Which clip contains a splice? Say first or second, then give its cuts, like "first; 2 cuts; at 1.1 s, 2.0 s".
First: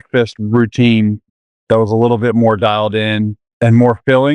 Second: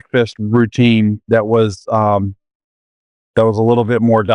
first; 2 cuts; at 1.2 s, 3.4 s